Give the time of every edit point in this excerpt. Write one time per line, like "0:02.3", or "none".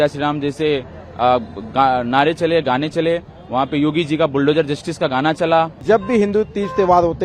0:05.8

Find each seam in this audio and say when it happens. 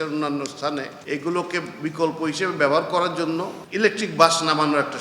0:00.9
0:03.6

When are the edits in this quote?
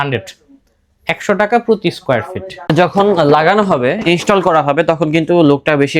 0:02.7

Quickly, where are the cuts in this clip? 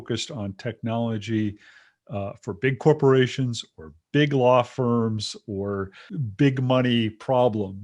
0:06.0

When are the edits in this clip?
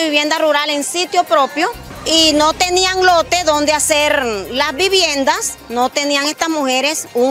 0:01.9

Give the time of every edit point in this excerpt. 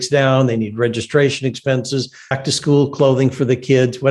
0:02.4

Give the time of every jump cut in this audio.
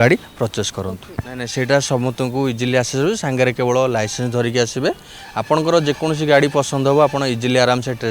none

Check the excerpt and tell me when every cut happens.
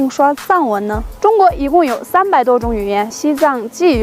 0:01.0
0:03.1

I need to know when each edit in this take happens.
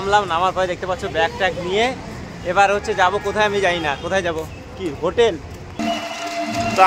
0:05.8

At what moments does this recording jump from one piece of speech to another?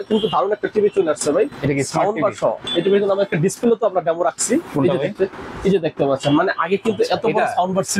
0:02.6

